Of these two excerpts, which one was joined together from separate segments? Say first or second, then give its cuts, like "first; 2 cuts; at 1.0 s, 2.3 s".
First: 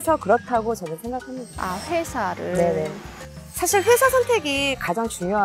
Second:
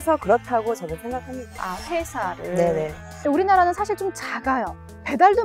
second; 1 cut; at 3.1 s